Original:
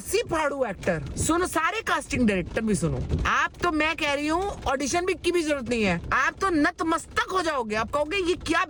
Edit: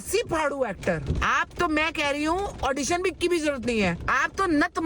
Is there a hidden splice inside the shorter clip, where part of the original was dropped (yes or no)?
yes